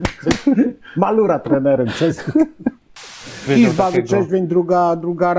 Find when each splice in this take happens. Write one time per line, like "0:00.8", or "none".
0:03.5